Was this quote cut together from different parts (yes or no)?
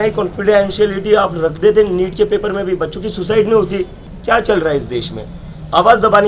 yes